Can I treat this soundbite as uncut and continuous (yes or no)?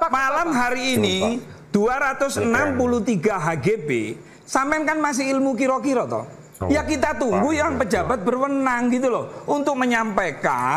yes